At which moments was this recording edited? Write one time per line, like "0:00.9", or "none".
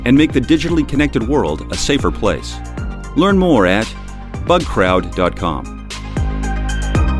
0:05.9

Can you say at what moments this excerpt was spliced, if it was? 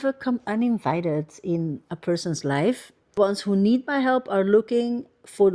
0:03.2

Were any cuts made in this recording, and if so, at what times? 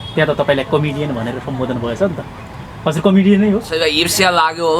0:03.7

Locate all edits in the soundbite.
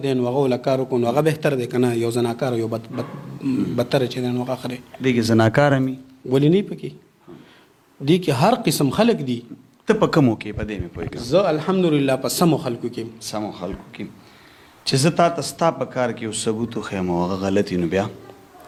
none

